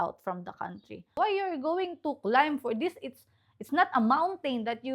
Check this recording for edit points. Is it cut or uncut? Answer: cut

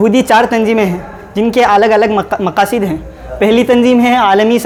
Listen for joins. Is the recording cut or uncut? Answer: uncut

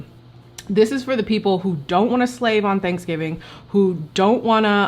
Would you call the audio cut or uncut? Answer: uncut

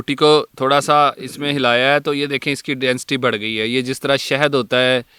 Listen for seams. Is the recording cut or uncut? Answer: uncut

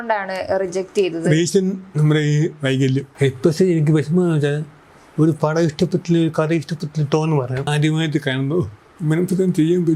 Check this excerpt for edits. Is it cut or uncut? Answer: cut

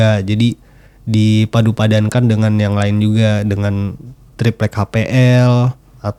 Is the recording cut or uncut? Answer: uncut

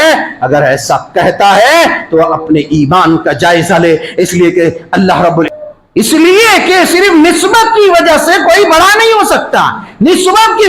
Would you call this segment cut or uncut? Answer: cut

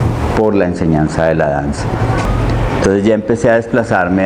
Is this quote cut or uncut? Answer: uncut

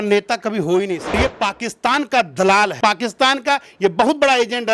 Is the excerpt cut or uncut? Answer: cut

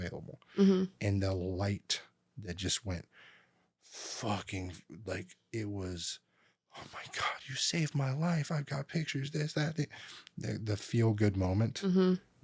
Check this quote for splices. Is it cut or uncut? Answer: uncut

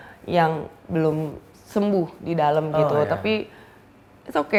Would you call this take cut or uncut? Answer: uncut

